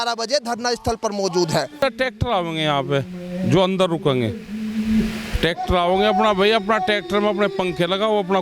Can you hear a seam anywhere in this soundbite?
yes; 1 cut; at 1.7 s

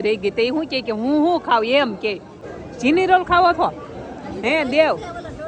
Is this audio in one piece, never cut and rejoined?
no; 1 cut; at 2.4 s

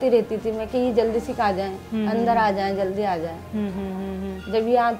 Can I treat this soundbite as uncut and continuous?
yes; 0 cuts

